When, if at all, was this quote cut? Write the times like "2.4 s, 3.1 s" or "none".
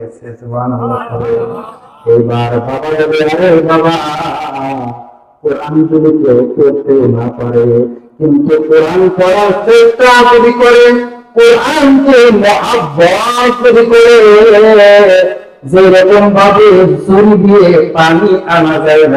none